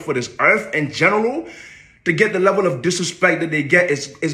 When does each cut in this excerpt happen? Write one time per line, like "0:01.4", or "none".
none